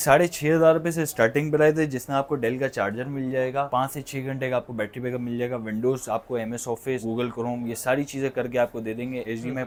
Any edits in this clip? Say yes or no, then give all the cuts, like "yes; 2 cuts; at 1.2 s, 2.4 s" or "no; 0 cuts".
no; 0 cuts